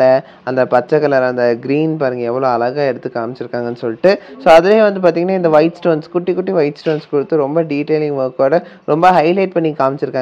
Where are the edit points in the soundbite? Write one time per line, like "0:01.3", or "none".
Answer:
none